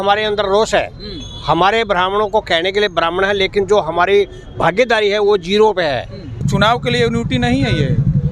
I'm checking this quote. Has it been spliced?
yes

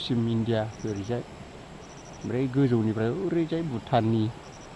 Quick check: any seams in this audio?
no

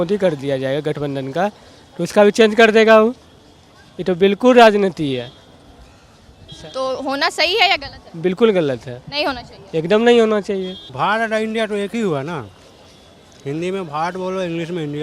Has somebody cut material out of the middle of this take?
no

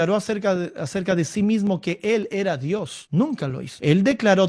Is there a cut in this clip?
no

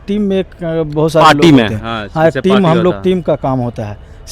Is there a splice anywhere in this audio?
no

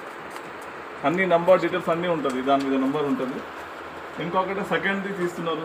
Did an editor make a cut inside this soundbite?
no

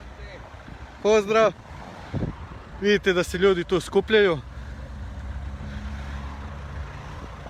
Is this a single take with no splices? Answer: yes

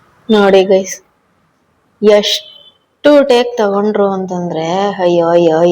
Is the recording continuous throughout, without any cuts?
yes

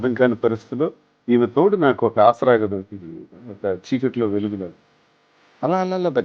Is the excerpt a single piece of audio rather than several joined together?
yes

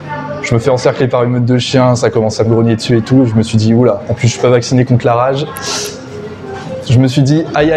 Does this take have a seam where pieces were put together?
no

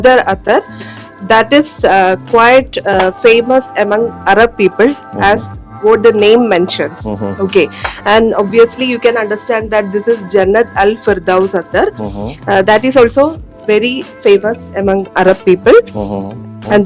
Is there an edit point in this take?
no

